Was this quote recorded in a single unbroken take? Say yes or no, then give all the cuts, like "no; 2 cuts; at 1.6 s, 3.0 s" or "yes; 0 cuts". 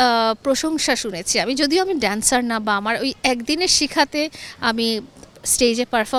yes; 0 cuts